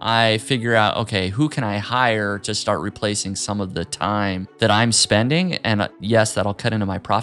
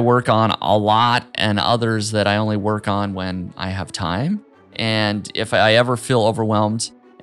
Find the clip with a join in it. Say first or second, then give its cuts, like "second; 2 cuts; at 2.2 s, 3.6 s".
first; 2 cuts; at 4.5 s, 6.0 s